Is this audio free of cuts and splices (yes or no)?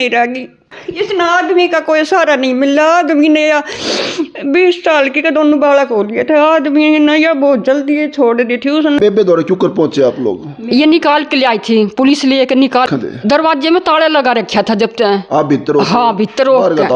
no